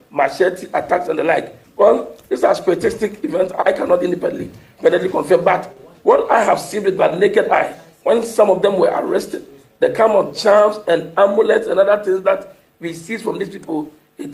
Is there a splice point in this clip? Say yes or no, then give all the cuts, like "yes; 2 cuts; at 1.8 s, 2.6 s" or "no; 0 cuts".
no; 0 cuts